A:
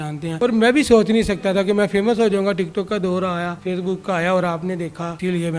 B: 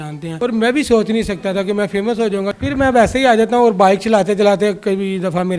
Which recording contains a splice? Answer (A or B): B